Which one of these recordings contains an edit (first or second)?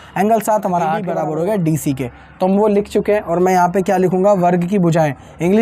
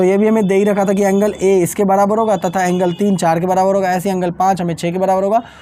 first